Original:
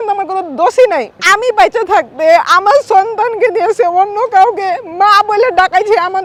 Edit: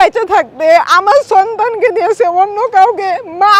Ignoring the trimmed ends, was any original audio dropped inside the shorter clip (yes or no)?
no